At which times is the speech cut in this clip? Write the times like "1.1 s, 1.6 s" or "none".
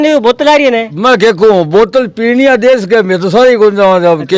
none

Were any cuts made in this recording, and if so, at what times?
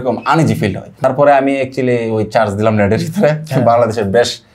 1.0 s

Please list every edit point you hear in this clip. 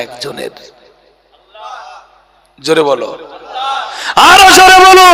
none

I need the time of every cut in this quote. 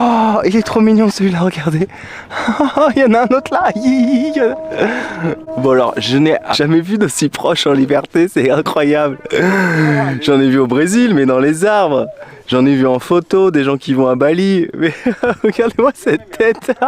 6.6 s

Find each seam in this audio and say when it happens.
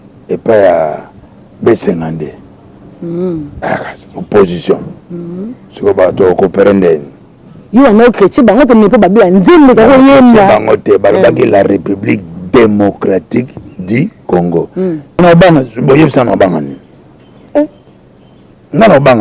15.2 s

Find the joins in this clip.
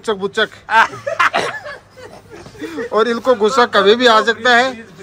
none

